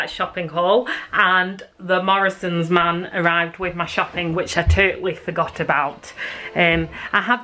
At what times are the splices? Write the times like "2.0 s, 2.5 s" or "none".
none